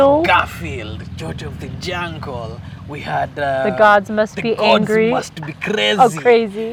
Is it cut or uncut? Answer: uncut